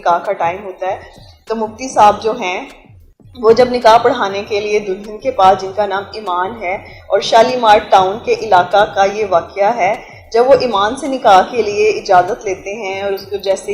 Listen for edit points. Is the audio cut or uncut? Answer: uncut